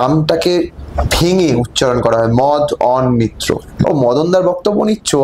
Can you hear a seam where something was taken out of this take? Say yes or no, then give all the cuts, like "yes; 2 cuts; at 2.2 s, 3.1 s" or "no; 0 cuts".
yes; 1 cut; at 3.9 s